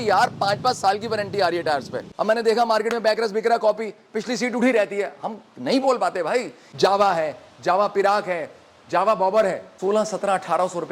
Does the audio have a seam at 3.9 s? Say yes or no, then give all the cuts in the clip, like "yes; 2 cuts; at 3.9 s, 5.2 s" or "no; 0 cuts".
no; 3 cuts; at 2.0 s, 6.6 s, 9.7 s